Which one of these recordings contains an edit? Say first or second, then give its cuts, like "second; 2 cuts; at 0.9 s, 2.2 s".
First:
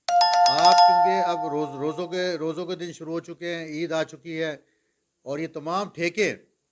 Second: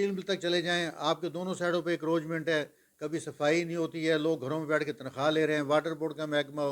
first; 1 cut; at 1.3 s